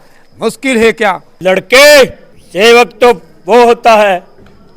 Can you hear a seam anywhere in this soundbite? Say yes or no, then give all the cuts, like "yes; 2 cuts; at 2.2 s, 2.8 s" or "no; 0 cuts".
yes; 1 cut; at 1.3 s